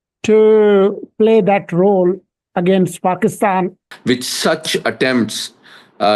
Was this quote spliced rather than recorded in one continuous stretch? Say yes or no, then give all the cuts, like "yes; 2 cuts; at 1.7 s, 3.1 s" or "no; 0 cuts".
yes; 1 cut; at 3.9 s